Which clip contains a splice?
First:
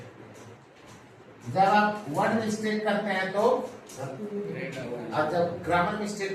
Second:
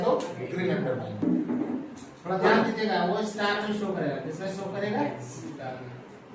second; 1 cut; at 1.2 s

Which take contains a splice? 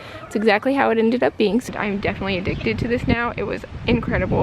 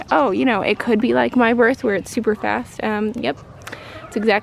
first; 1 cut; at 1.7 s

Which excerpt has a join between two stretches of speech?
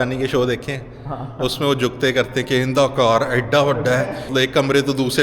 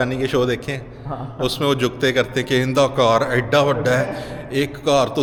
first; 1 cut; at 4.3 s

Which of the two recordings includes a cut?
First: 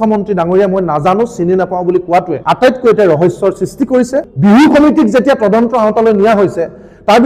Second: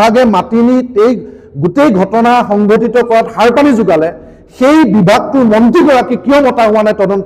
first; 2 cuts; at 2.4 s, 4.2 s

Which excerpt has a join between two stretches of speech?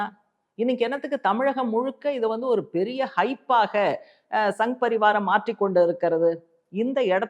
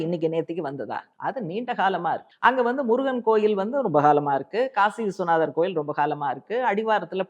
second; 2 cuts; at 1.0 s, 2.3 s

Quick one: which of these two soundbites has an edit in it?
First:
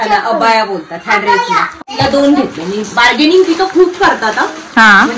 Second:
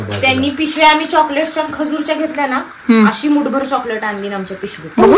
first; 1 cut; at 1.8 s

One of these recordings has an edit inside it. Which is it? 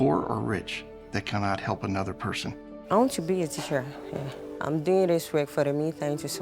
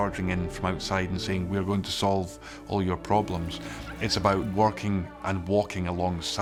first; 2 cuts; at 2.7 s, 4.4 s

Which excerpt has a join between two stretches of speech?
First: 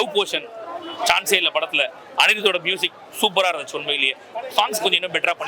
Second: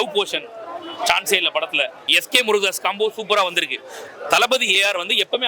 second; 1 cut; at 2.0 s

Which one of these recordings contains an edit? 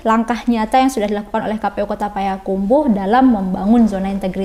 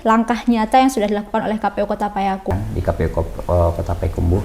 second; 1 cut; at 2.5 s

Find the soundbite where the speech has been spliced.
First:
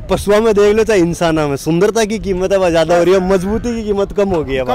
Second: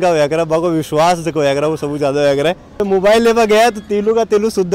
second; 1 cut; at 2.7 s

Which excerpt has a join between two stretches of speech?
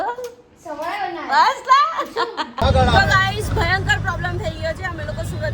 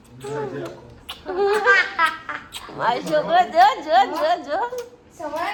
first; 1 cut; at 2.5 s

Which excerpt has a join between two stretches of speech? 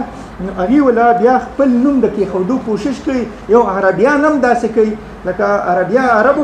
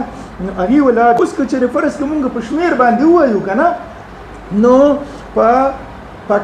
second; 1 cut; at 1.2 s

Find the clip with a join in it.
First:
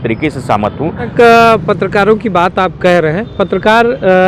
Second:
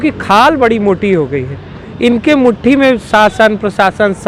first; 1 cut; at 1.1 s

